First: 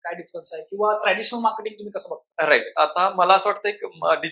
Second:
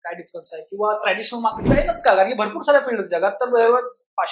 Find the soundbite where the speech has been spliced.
second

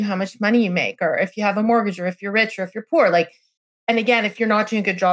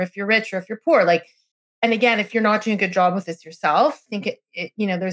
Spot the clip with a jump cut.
second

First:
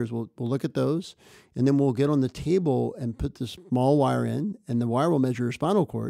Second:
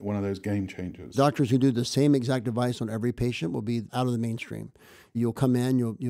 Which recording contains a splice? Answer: second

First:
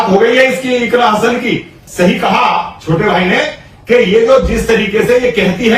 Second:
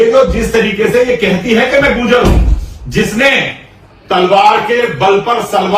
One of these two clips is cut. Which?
first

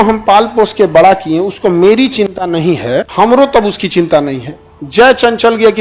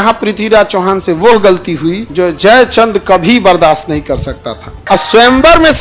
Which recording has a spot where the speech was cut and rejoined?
second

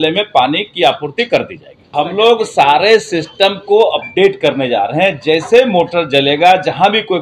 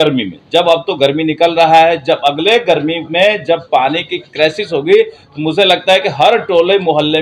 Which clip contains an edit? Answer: first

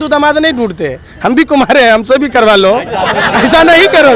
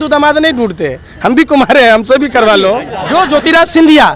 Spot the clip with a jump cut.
second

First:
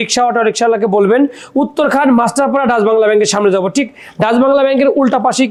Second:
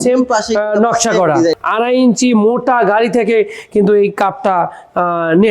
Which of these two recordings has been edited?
second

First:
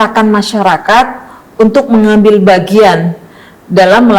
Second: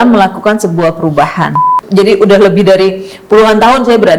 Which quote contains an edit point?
second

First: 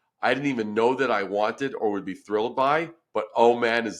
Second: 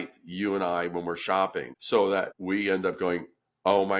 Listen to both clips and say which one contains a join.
second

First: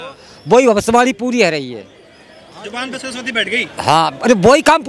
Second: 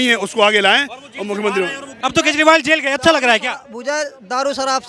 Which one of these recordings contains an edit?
second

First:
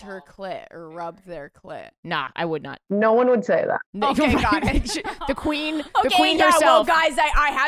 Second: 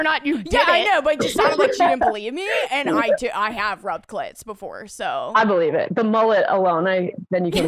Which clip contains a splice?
second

